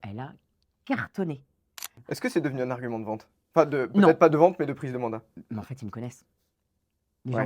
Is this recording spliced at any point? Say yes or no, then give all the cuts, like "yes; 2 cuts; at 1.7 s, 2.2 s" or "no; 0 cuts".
yes; 1 cut; at 2.0 s